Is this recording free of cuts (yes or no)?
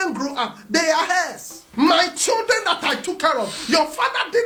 yes